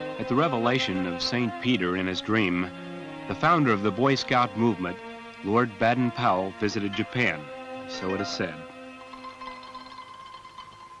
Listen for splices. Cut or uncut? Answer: uncut